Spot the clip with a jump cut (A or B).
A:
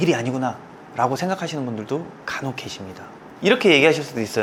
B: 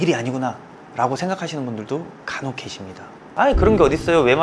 B